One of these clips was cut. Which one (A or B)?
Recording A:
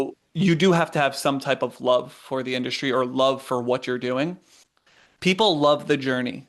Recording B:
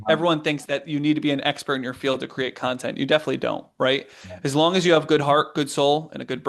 A